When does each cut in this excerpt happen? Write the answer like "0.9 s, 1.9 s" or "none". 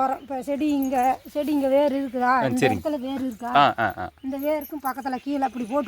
1.0 s

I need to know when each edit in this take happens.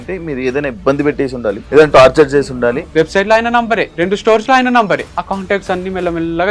1.6 s, 2.8 s, 3.9 s, 5.1 s

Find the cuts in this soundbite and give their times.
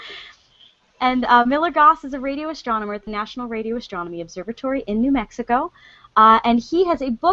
4.1 s

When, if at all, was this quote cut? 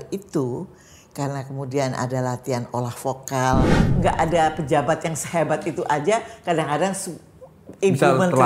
3.8 s

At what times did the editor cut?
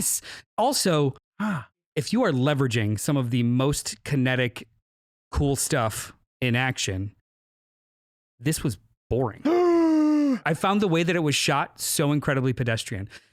1.9 s, 10.4 s

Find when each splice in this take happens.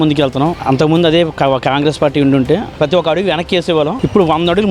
2.8 s

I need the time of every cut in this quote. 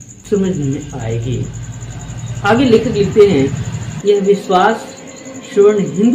none

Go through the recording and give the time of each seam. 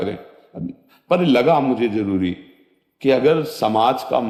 none

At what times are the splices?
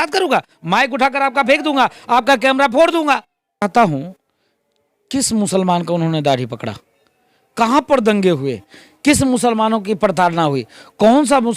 3.6 s

